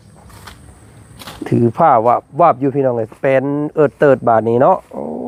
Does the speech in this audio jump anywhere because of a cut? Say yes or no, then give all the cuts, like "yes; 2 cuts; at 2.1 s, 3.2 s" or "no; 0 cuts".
no; 0 cuts